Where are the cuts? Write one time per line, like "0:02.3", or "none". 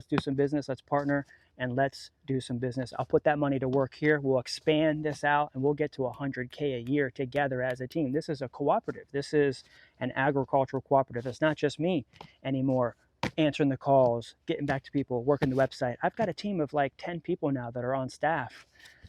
none